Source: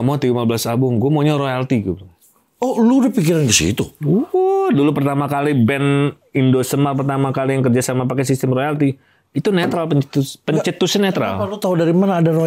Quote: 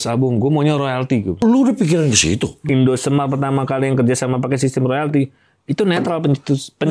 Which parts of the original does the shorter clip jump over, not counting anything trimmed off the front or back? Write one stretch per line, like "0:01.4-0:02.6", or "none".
0:02.0-0:02.7
0:03.9-0:06.2